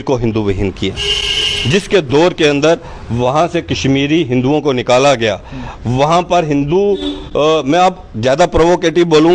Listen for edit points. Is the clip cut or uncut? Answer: uncut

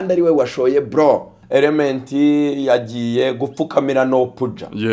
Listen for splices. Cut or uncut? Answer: cut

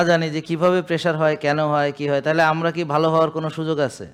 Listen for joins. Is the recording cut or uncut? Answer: uncut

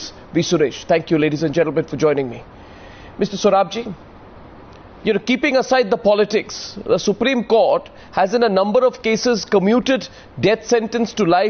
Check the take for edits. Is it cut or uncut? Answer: uncut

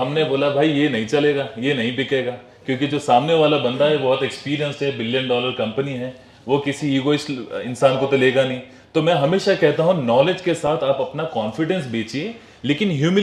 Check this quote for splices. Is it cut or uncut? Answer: uncut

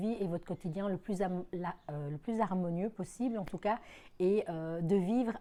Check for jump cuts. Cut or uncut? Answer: uncut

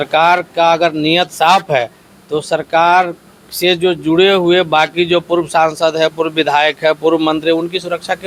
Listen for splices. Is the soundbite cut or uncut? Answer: uncut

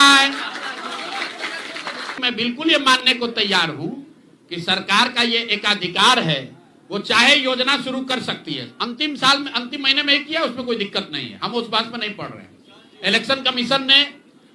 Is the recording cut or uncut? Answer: cut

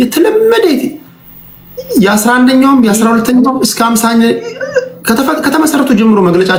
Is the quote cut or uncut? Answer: uncut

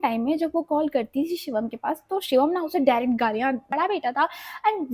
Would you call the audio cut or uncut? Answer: cut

